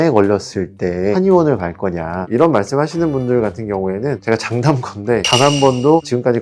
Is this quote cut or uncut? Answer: cut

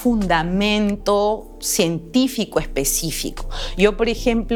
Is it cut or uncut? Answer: uncut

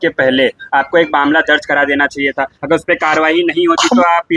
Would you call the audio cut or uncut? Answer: uncut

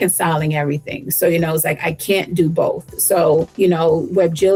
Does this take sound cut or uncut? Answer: uncut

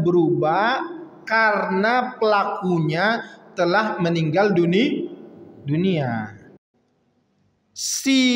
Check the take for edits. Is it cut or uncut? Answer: cut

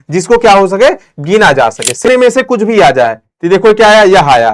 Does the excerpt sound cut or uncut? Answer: cut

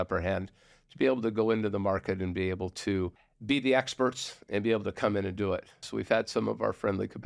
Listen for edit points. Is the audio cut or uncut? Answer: cut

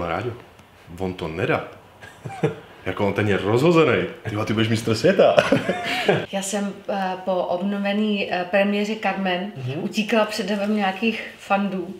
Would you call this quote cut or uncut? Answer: cut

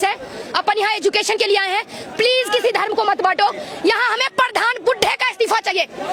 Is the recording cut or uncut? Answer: uncut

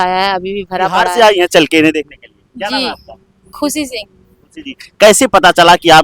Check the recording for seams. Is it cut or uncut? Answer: cut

